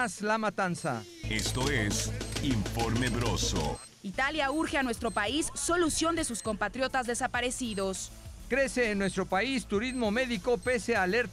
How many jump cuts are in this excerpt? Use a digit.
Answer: 3